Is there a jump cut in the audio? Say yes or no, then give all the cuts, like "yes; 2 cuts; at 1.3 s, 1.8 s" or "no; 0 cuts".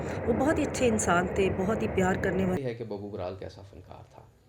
yes; 1 cut; at 2.6 s